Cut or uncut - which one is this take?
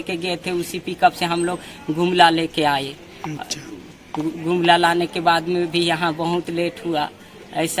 uncut